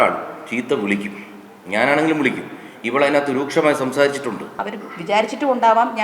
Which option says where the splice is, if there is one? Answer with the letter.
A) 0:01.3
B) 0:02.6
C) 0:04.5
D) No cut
C